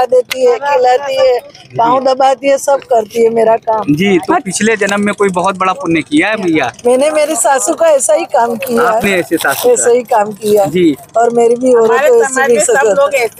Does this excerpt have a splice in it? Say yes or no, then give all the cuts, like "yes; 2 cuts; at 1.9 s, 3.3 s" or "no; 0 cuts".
no; 0 cuts